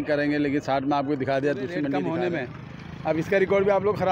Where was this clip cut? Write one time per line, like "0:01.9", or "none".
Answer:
0:02.0